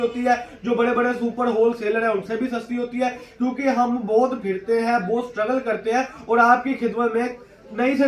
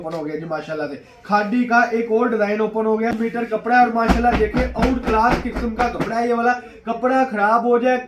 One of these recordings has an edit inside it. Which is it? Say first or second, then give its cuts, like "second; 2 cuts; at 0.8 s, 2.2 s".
second; 1 cut; at 3.1 s